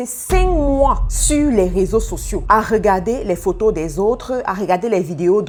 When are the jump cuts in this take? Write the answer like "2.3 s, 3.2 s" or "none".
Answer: none